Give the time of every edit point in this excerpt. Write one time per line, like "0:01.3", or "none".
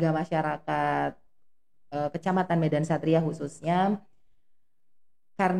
none

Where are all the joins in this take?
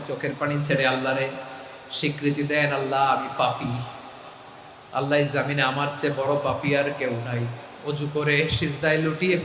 none

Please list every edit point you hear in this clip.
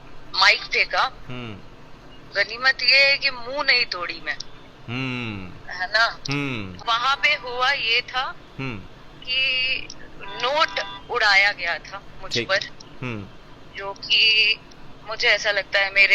0:06.8

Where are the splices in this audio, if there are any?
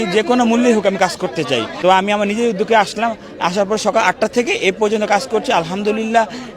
0:01.7

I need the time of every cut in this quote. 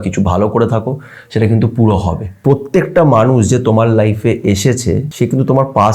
0:02.4
0:05.1

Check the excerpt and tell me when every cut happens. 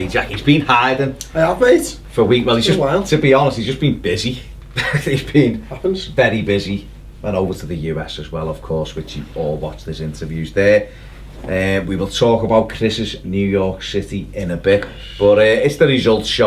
none

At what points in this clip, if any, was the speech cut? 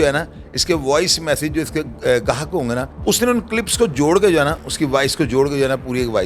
0:02.9

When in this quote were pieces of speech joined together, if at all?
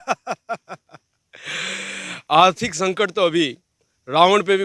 none

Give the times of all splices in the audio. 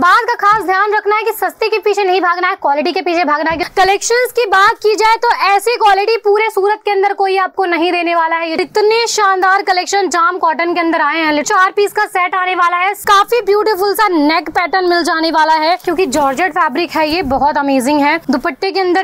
0:03.6
0:08.6
0:11.5
0:13.0
0:15.8
0:18.2

